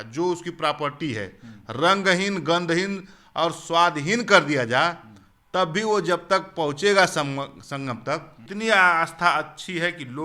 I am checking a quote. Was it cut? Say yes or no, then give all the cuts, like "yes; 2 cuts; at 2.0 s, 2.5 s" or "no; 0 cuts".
yes; 1 cut; at 8.4 s